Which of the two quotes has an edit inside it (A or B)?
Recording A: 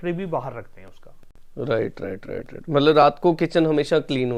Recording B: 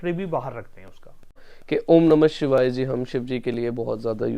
B